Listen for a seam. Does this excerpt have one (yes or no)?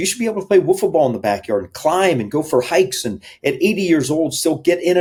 no